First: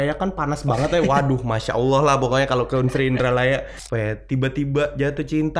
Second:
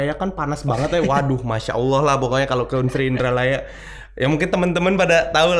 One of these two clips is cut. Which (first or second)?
first